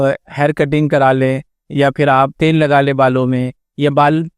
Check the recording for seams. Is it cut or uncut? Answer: cut